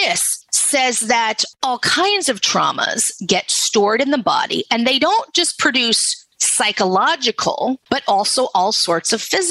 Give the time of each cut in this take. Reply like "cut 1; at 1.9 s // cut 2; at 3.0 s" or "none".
cut 1; at 1.4 s // cut 2; at 7.8 s